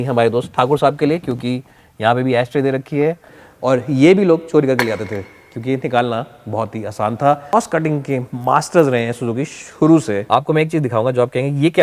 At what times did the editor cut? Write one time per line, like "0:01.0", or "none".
0:03.4
0:07.4
0:10.2